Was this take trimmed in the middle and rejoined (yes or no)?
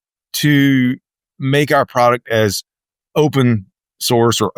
no